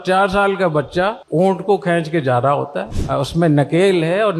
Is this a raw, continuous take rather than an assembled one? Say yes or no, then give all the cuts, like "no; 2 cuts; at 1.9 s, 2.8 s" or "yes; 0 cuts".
no; 1 cut; at 2.9 s